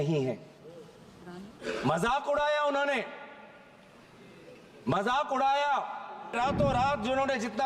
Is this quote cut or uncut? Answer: cut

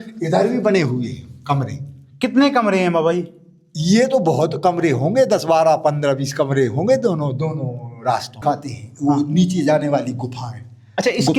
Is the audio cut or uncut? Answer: cut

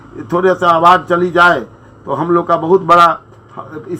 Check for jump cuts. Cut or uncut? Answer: uncut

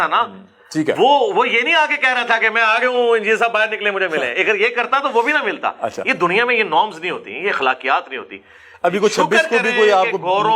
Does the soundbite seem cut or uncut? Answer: uncut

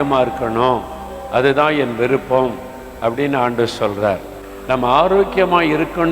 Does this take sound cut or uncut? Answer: uncut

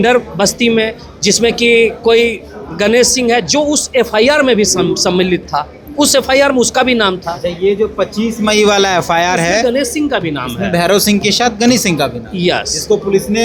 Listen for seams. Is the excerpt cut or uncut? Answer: uncut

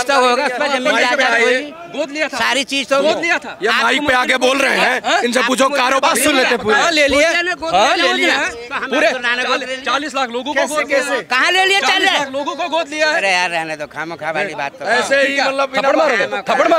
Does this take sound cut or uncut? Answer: uncut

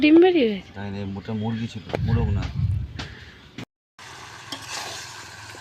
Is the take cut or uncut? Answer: cut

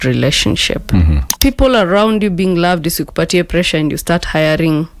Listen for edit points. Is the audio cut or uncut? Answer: cut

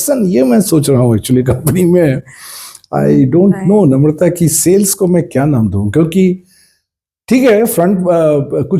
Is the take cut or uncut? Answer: uncut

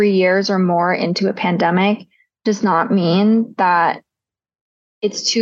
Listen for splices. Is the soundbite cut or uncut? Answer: uncut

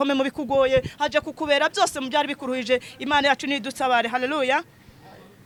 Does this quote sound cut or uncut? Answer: uncut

